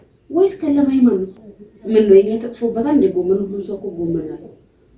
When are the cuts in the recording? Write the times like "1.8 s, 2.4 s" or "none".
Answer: 1.3 s